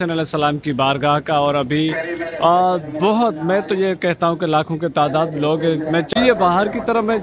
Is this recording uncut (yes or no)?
no